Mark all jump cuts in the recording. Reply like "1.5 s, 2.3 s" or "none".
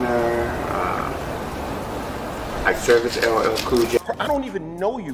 4.0 s